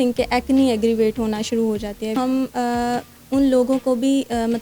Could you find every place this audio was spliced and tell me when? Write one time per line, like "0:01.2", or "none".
0:02.1